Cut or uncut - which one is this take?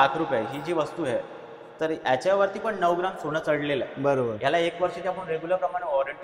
uncut